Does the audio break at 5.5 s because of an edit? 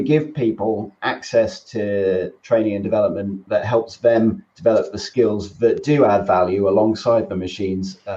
no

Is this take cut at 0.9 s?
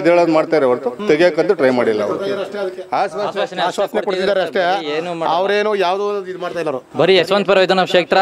yes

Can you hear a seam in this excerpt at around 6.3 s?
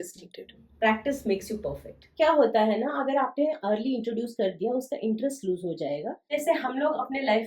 yes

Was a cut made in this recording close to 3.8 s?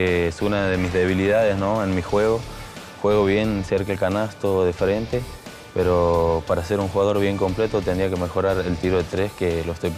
no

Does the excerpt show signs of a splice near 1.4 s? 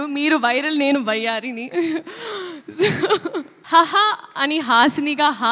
no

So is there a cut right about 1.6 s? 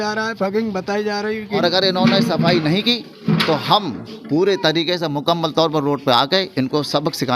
yes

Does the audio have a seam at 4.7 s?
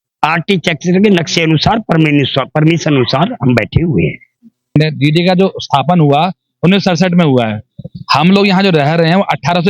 yes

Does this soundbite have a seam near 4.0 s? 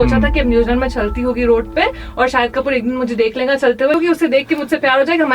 yes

